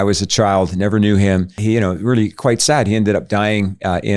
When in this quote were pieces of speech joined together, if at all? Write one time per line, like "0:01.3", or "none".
0:01.6